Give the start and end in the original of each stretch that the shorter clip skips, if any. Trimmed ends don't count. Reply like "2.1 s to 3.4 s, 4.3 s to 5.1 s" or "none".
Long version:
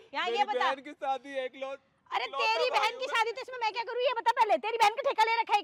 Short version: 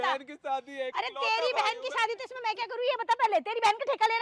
1.5 s to 2.1 s